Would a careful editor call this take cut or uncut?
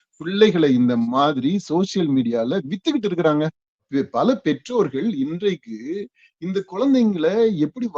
cut